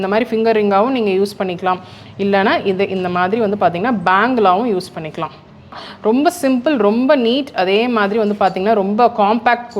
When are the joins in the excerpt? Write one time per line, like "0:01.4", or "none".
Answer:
0:05.9

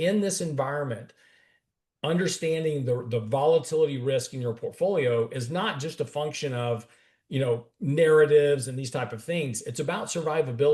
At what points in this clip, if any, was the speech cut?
none

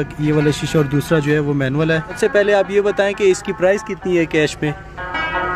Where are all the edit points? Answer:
0:02.2

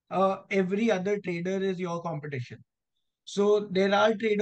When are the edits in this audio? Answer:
none

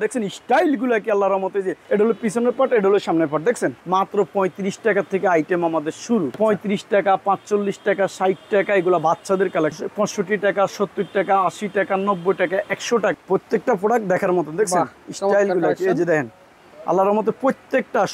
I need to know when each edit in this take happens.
0:01.8
0:03.8
0:06.4
0:09.8
0:13.1

